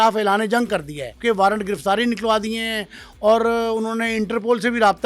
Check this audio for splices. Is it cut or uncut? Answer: cut